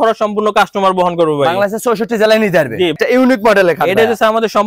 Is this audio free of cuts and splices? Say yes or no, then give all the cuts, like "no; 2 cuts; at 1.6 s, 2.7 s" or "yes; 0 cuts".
no; 1 cut; at 2.9 s